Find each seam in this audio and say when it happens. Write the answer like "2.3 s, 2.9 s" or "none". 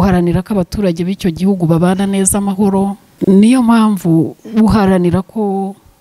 3.1 s